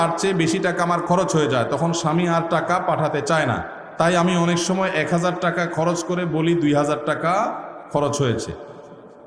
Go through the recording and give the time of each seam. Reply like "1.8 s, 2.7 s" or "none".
3.8 s